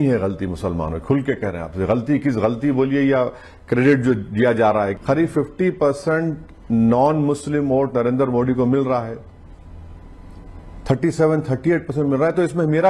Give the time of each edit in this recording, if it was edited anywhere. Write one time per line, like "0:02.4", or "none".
0:04.9